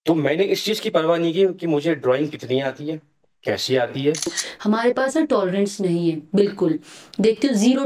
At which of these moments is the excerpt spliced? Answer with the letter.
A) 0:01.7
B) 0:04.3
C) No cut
B